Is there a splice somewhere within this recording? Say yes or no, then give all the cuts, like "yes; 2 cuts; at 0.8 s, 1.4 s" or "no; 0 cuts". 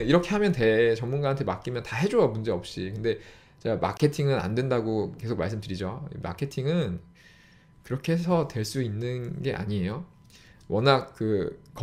no; 0 cuts